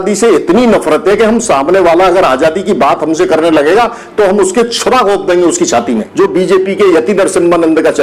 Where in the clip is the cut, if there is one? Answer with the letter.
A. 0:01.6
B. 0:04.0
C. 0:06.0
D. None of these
C